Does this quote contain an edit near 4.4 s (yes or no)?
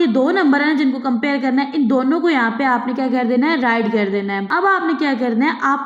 yes